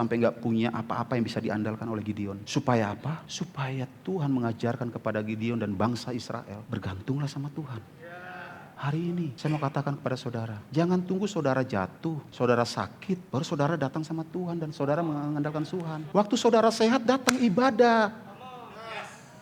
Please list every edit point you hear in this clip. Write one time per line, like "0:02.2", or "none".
0:02.4
0:03.3
0:06.6
0:08.7
0:09.4
0:10.6
0:12.2
0:13.2
0:16.0